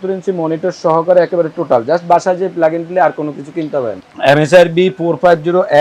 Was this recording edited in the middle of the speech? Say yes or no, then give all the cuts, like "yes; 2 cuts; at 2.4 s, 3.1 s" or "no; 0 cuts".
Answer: yes; 1 cut; at 3.9 s